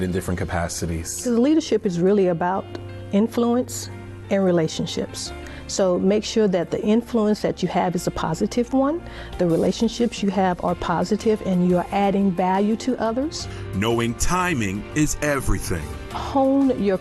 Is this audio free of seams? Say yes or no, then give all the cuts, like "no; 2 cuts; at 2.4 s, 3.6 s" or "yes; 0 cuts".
yes; 0 cuts